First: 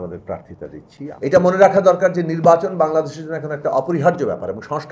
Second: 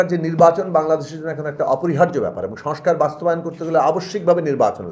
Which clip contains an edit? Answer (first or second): first